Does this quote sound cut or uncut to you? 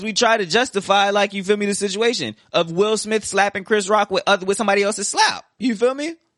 uncut